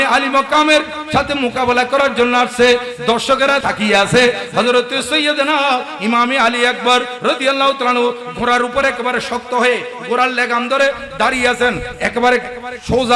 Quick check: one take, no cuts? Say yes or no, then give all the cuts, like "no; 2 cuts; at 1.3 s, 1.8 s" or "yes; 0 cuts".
no; 1 cut; at 3.6 s